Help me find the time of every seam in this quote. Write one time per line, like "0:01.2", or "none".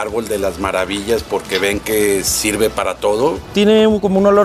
0:03.4